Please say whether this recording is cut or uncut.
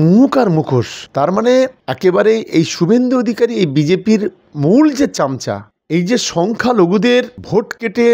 uncut